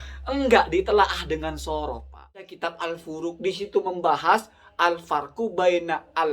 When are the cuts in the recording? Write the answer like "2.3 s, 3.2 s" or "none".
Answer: 2.5 s